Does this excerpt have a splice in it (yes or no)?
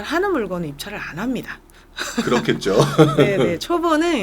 no